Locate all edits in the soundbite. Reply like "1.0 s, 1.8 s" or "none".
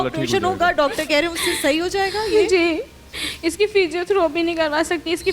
none